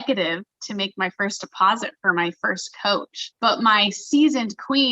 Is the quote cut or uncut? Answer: cut